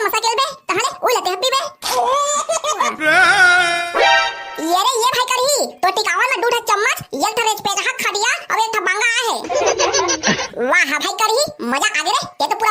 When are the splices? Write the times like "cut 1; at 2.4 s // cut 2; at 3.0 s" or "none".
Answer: cut 1; at 2.9 s // cut 2; at 10.5 s